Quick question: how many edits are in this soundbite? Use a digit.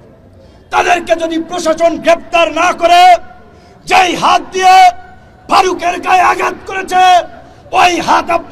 0